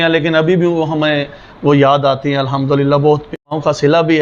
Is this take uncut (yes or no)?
no